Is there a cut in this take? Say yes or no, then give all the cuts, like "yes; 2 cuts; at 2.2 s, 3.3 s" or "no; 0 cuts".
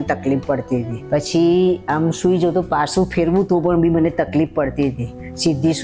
no; 0 cuts